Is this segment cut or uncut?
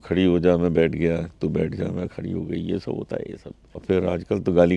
cut